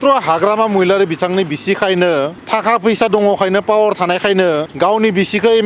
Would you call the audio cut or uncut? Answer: cut